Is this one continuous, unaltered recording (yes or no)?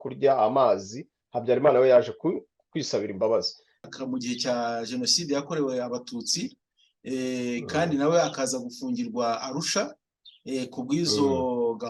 no